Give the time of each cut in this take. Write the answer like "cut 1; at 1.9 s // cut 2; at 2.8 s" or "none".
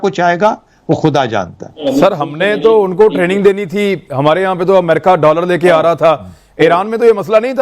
cut 1; at 1.8 s